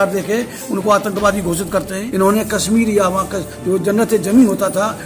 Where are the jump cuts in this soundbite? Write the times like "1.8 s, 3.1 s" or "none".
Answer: 2.0 s